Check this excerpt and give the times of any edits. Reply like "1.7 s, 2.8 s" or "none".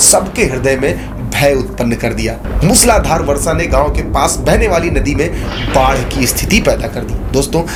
none